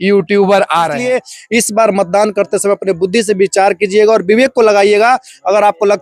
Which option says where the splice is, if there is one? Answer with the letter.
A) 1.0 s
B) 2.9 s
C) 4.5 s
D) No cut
A